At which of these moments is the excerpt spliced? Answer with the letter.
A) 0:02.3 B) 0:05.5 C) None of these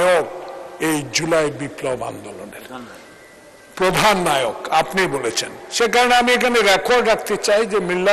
C